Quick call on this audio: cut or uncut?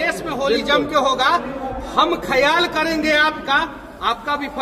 uncut